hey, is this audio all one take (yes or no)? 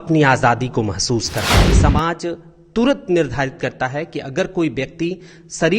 no